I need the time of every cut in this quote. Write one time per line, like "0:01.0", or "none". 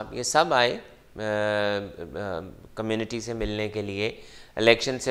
none